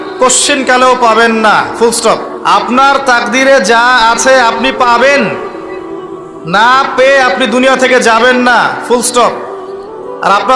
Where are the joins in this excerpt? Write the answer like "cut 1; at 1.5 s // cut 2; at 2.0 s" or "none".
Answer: cut 1; at 2.3 s